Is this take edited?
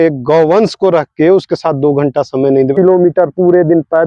yes; 1 cut; at 2.8 s

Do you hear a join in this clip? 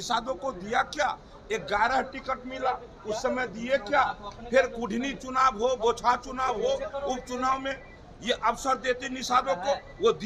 no; 0 cuts

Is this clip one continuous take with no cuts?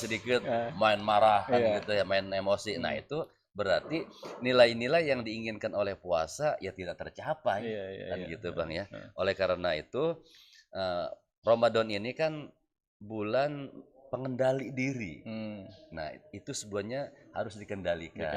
yes; 0 cuts

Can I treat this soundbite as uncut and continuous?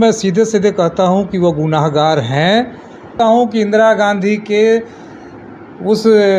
no; 1 cut; at 3.1 s

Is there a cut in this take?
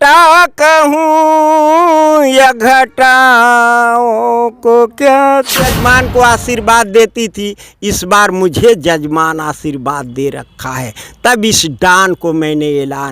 yes; 1 cut; at 5.6 s

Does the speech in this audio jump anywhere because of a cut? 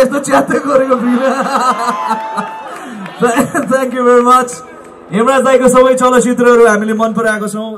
no; 0 cuts

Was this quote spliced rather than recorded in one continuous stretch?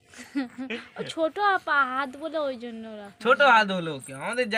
no; 0 cuts

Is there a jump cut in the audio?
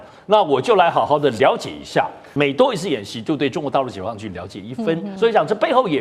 yes; 2 cuts; at 2.3 s, 5.1 s

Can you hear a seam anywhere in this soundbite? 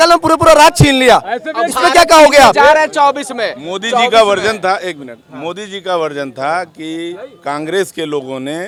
no; 0 cuts

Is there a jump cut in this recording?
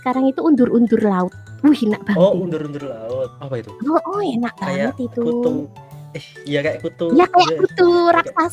no; 0 cuts

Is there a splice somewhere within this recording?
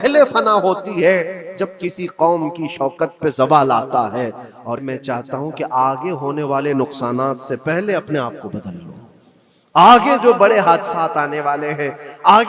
yes; 1 cut; at 4.8 s

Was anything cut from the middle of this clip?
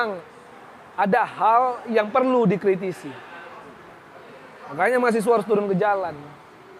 no; 0 cuts

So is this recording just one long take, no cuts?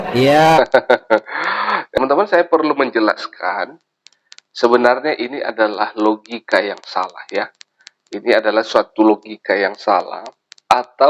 no; 1 cut; at 2.0 s

